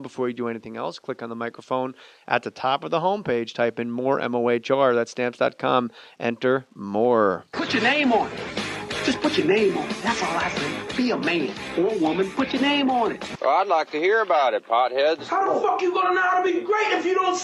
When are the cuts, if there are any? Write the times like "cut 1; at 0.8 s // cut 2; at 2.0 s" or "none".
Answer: cut 1; at 9.6 s